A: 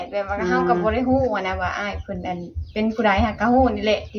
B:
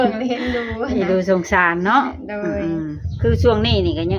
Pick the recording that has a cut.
B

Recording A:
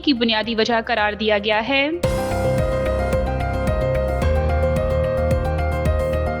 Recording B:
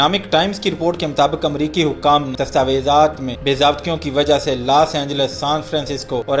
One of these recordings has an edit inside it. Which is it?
A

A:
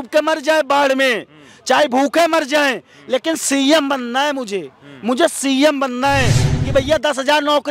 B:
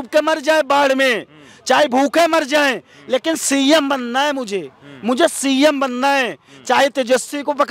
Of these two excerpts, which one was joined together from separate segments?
A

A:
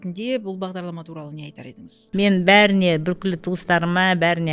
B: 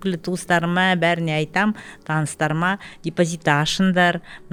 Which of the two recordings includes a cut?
A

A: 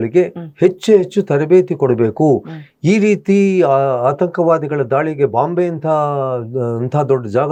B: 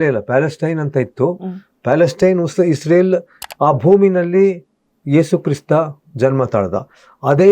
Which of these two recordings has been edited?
B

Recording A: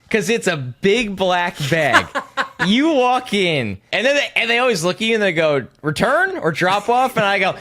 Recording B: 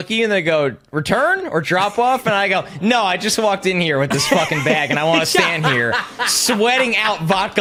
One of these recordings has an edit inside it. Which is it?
A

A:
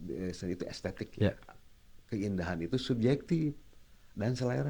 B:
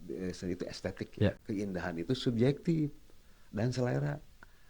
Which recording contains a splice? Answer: B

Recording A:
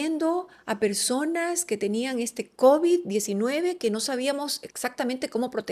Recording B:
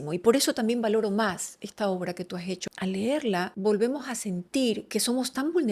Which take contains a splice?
B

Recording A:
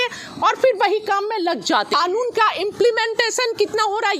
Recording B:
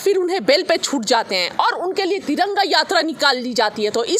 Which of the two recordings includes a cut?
A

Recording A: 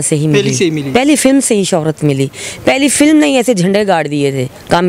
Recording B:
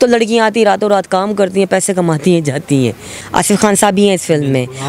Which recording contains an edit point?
B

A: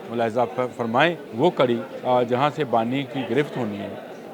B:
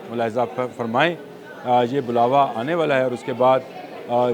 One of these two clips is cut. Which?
A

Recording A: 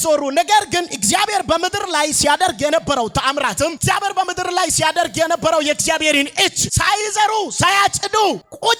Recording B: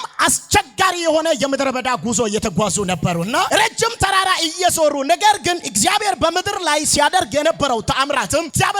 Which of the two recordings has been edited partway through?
B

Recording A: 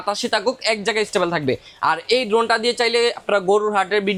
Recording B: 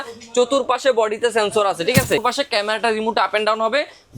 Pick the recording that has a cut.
B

